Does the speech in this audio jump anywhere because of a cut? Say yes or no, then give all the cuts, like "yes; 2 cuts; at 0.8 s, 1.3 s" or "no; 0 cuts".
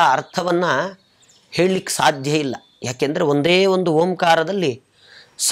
no; 0 cuts